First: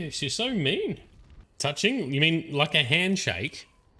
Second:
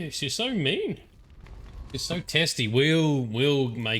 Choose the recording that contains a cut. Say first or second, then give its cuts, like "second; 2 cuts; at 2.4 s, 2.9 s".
first; 1 cut; at 1.4 s